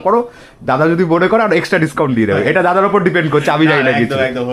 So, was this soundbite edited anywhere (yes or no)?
no